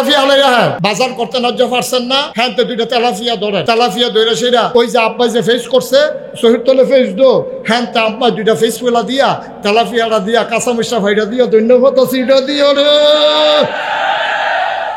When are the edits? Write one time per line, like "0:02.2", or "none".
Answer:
0:00.8
0:02.3
0:03.6
0:04.7